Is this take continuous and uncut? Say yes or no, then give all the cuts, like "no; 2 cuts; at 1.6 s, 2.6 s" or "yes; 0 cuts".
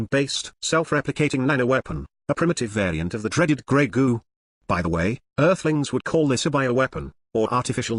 no; 1 cut; at 5.1 s